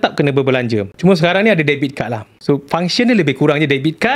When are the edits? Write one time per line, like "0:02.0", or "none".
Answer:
0:00.9